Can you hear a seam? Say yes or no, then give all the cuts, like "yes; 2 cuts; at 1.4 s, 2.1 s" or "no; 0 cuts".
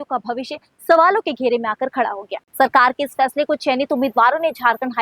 no; 0 cuts